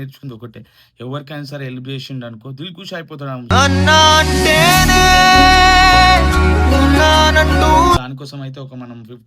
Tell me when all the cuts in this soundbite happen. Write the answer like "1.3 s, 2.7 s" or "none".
8.0 s